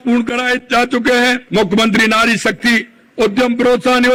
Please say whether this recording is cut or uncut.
uncut